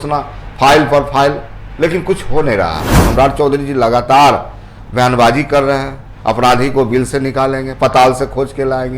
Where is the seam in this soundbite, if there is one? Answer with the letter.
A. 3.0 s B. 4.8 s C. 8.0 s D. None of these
A